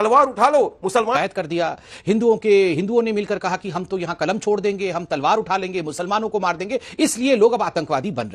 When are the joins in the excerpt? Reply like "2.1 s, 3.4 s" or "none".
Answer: 1.1 s